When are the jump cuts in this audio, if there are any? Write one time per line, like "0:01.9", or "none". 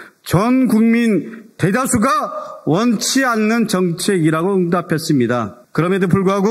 0:05.6